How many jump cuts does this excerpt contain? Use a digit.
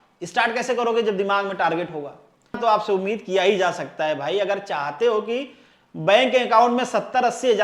1